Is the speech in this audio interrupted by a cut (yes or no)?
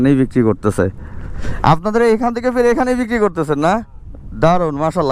no